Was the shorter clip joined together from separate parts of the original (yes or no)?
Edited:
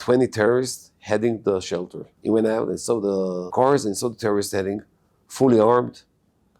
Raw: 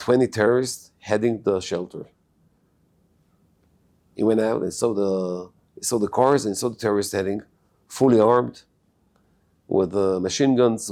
yes